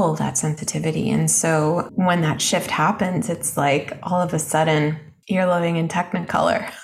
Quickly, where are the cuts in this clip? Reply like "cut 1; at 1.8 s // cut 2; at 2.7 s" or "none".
cut 1; at 1.9 s // cut 2; at 5.1 s